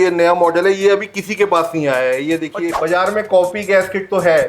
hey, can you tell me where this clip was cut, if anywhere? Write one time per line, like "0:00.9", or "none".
0:02.7